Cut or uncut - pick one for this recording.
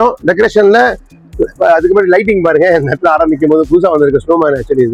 uncut